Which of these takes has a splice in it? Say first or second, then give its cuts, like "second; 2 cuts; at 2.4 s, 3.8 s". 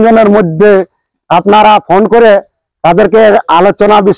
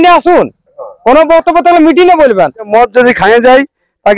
second; 1 cut; at 2.7 s